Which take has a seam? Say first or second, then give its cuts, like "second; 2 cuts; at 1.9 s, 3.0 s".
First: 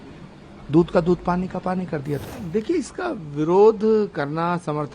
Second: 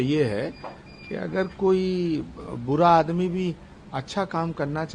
first; 1 cut; at 2.2 s